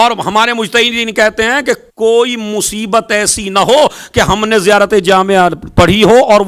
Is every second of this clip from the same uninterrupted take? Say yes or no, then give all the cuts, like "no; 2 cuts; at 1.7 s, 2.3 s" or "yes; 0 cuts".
yes; 0 cuts